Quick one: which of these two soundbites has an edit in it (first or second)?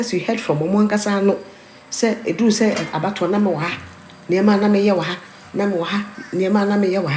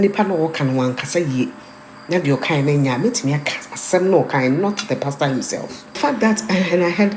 second